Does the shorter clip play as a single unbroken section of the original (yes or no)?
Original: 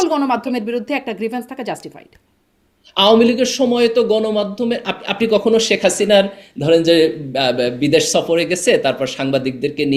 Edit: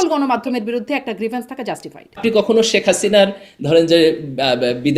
no